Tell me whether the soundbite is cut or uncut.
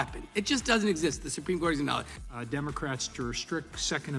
cut